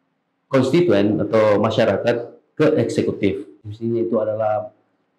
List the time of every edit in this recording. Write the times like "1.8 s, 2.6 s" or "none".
3.6 s

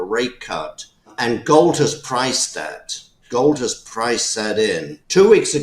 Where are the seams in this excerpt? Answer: 1.1 s, 3.2 s

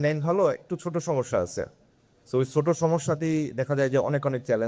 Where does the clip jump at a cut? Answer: none

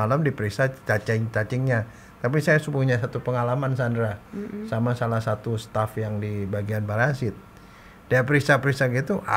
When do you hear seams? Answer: none

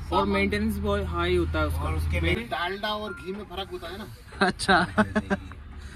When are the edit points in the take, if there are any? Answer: 2.3 s

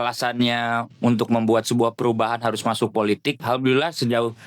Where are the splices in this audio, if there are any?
3.4 s

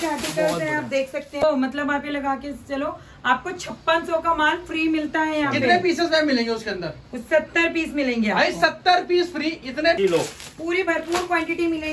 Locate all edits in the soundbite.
1.4 s, 10.0 s

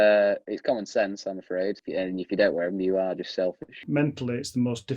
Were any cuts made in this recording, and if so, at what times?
1.8 s, 3.9 s

